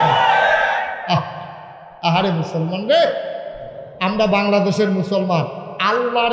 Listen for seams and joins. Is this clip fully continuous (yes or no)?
no